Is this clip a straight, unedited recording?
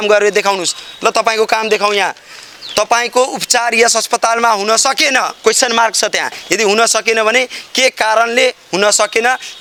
yes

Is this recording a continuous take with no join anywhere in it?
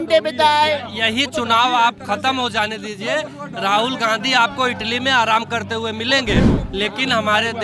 yes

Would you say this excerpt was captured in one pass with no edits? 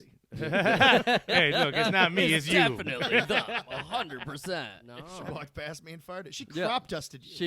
no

